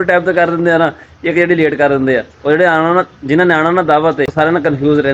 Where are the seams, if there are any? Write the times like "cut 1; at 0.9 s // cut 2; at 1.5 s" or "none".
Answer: none